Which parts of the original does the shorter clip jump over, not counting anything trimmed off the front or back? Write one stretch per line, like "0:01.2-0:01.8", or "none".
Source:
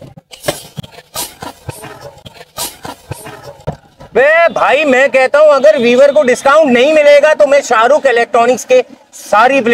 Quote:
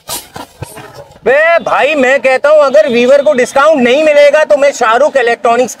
0:03.6-0:04.0